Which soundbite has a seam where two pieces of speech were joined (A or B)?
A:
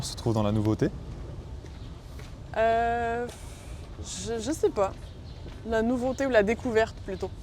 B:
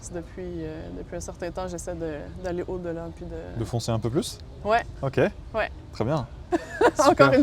B